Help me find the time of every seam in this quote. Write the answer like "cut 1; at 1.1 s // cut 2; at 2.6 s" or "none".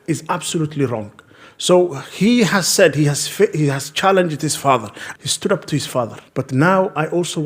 cut 1; at 5.0 s // cut 2; at 6.2 s